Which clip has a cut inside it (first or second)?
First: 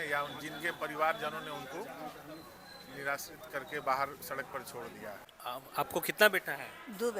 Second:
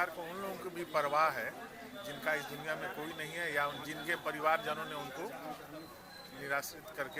first